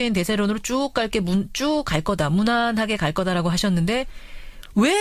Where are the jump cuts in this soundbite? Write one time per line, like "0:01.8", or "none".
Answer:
none